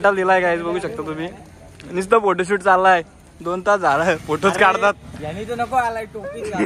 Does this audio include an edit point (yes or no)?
no